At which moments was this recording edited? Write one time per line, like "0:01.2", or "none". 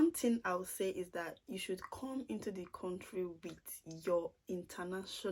none